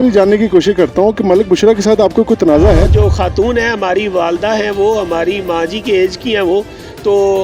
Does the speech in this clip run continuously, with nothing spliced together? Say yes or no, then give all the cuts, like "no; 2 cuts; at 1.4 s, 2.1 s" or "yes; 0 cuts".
no; 1 cut; at 2.9 s